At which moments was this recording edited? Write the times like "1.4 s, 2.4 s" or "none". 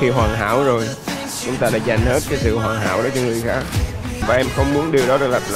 4.2 s